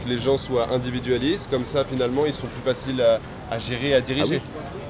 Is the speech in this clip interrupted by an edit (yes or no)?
no